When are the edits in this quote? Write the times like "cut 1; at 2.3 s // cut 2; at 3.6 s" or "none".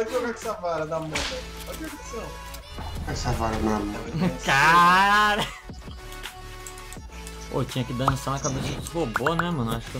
cut 1; at 5.6 s